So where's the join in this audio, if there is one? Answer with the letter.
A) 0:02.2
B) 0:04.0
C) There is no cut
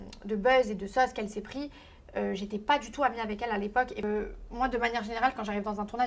B